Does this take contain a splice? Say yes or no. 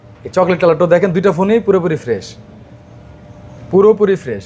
no